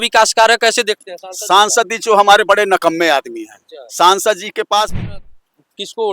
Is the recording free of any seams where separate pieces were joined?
no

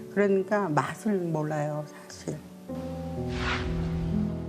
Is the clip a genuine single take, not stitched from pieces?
yes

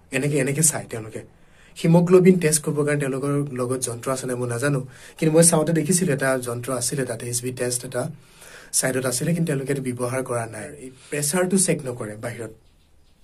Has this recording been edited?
yes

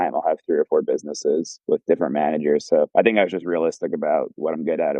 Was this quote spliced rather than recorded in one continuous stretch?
yes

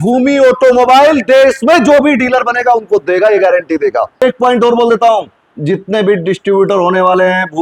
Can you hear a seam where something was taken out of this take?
yes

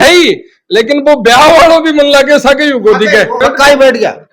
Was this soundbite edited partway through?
yes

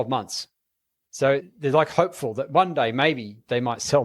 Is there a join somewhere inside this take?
yes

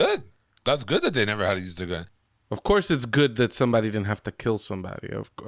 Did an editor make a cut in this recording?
yes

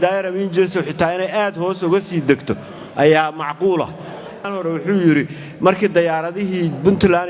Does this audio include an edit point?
yes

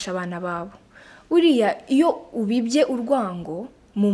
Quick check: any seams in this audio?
no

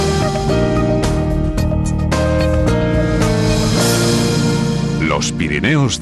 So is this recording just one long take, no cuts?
yes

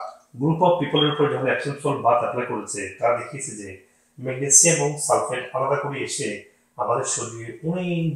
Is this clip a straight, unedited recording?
yes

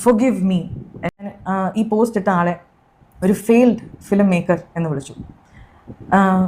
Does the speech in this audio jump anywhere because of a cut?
yes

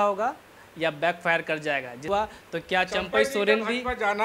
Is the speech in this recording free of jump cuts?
no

